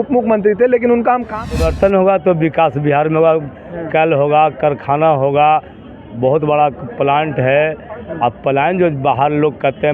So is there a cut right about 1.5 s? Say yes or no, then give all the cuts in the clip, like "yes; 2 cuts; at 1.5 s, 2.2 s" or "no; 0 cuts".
yes; 1 cut; at 1.5 s